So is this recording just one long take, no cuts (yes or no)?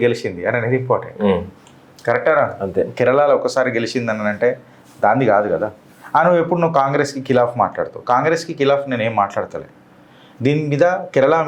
yes